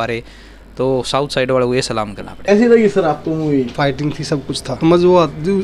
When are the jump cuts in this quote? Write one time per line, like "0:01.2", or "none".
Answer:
0:02.4
0:04.1